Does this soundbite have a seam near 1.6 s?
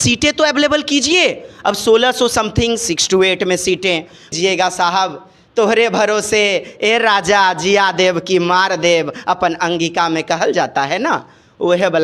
no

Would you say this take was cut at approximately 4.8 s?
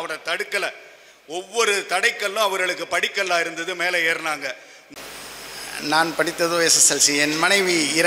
yes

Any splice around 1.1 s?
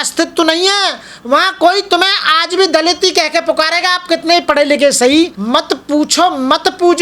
no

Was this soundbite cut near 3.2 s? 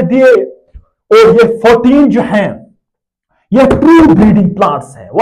no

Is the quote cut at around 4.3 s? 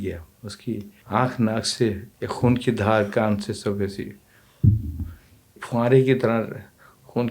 no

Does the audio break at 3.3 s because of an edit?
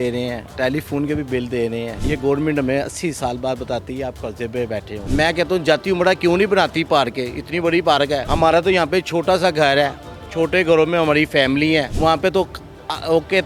no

